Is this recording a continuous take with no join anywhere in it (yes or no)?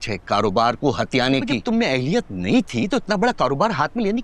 no